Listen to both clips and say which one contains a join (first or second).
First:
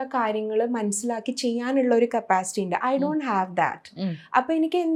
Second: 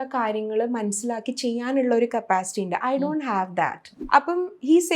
second